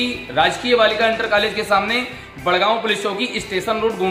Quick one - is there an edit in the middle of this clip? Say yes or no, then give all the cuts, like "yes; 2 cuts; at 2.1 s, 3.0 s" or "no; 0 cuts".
no; 0 cuts